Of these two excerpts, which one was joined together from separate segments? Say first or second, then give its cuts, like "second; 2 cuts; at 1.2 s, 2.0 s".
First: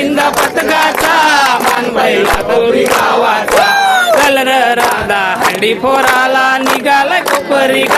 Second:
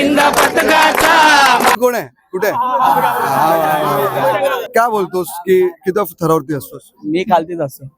second; 2 cuts; at 1.8 s, 4.6 s